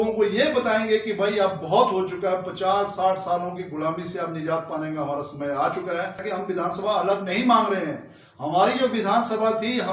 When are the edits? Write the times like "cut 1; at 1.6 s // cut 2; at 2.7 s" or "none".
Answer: cut 1; at 6.3 s